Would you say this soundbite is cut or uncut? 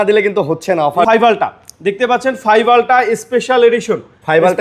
cut